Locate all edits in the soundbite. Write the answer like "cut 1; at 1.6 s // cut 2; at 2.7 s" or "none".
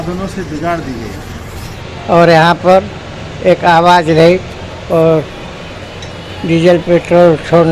cut 1; at 1.7 s